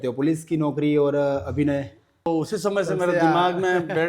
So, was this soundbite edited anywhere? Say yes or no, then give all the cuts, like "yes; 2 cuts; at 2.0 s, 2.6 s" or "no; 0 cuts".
yes; 1 cut; at 2.3 s